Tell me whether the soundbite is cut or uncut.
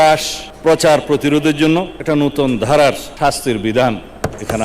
cut